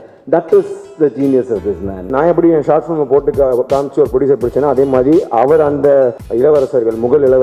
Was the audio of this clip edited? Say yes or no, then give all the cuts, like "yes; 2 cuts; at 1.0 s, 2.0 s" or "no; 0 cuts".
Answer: yes; 2 cuts; at 2.1 s, 6.2 s